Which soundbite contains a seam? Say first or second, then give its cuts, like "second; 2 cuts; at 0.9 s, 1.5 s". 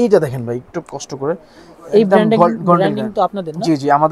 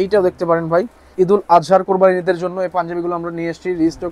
second; 1 cut; at 1.1 s